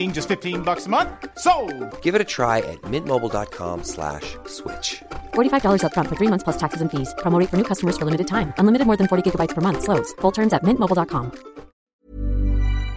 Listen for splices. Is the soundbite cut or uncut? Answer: cut